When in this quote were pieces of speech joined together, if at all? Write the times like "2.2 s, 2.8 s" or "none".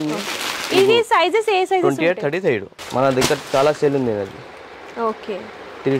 2.7 s